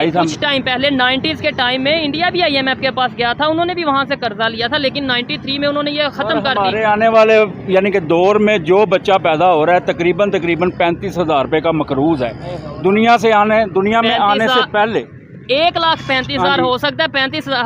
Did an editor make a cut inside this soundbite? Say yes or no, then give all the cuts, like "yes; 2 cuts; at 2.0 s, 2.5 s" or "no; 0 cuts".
no; 0 cuts